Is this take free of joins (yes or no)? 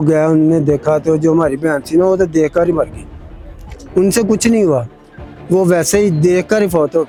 yes